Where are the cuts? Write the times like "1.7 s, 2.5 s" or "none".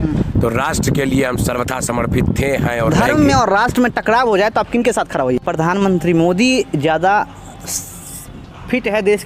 2.9 s, 5.4 s